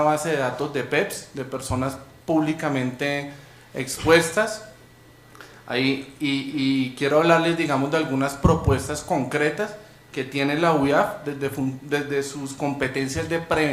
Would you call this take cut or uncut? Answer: cut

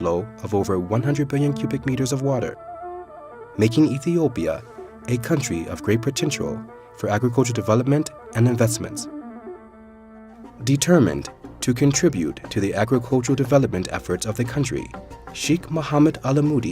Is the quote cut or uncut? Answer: cut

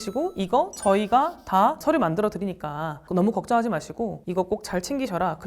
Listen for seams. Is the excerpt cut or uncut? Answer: cut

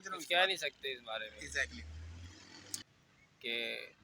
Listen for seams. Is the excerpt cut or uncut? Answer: cut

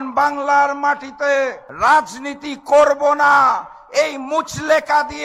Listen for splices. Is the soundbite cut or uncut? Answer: cut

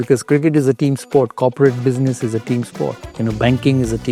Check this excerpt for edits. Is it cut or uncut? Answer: uncut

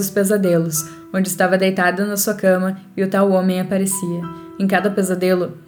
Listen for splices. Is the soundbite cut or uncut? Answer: uncut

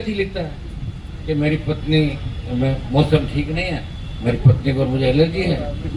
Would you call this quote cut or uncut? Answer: uncut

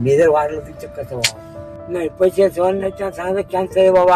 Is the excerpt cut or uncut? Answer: cut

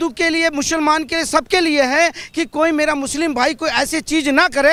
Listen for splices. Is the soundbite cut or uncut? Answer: uncut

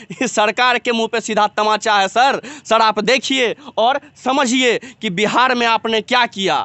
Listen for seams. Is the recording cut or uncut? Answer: uncut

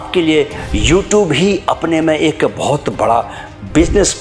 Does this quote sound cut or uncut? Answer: uncut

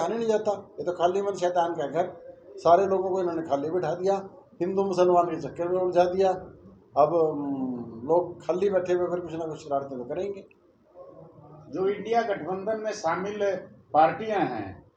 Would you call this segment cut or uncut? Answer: uncut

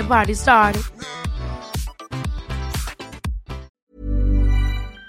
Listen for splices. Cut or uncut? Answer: cut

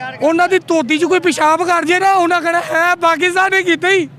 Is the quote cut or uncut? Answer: uncut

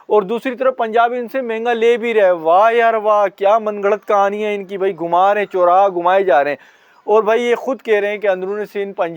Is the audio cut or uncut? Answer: uncut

